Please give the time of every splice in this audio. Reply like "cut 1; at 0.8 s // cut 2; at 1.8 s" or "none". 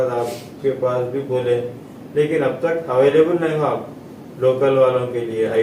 none